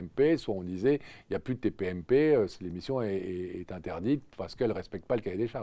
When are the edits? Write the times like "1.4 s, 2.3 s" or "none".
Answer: none